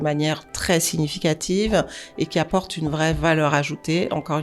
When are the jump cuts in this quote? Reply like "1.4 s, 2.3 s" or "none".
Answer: none